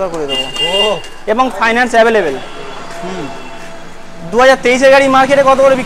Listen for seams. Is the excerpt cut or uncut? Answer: uncut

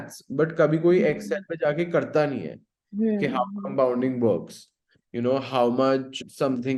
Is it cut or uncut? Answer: uncut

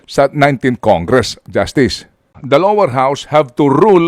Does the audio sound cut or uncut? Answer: cut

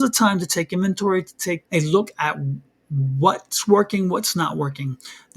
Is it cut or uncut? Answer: cut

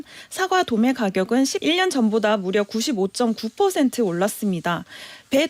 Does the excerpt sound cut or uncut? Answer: cut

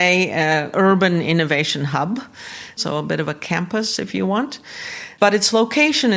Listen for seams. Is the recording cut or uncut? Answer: cut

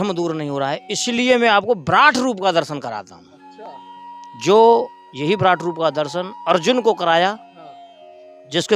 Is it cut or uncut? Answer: uncut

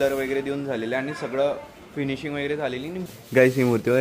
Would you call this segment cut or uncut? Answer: cut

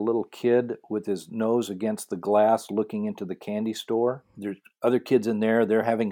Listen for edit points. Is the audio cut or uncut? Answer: cut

